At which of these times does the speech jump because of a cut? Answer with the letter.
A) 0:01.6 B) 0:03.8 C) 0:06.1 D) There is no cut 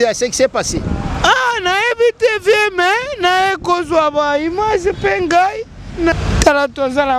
C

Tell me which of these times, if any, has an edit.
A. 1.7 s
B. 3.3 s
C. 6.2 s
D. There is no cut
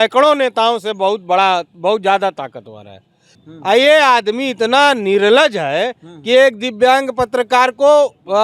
B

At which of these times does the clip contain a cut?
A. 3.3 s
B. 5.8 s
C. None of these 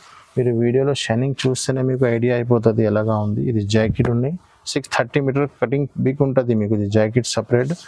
C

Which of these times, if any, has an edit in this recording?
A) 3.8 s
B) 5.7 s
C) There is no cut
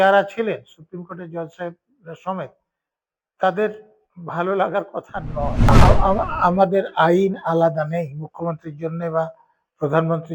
B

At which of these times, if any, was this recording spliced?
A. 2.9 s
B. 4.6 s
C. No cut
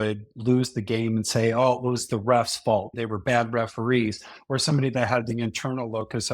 A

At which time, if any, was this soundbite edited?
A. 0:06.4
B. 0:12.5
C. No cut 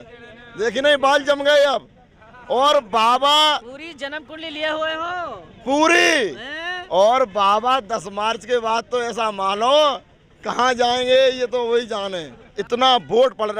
B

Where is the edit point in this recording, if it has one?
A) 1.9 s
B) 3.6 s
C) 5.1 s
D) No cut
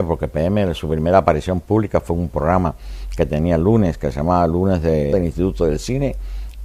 D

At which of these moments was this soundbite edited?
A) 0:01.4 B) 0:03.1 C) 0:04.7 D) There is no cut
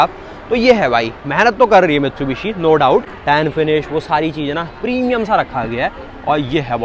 B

